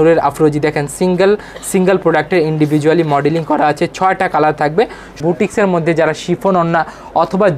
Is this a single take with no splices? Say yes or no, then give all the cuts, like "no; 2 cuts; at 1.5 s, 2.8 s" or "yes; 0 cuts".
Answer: no; 1 cut; at 5.1 s